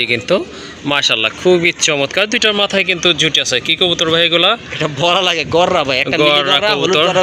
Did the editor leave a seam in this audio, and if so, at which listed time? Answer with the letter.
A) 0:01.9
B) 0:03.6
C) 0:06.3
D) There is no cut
D